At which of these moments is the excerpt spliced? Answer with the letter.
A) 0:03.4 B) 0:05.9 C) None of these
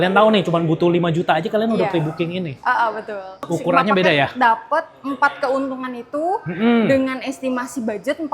A